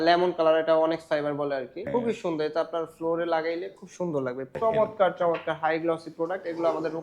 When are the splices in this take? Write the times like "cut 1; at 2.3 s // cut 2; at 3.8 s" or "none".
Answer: cut 1; at 1.8 s // cut 2; at 4.5 s